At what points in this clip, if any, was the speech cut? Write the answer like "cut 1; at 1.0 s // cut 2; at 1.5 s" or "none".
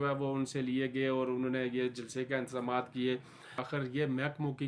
cut 1; at 3.6 s